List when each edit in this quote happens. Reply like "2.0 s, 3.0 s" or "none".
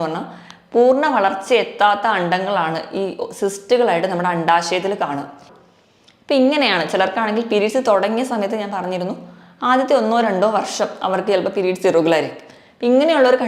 5.5 s